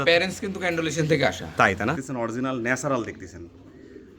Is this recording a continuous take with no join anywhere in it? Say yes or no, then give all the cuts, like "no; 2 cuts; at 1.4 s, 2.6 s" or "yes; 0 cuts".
no; 1 cut; at 2.0 s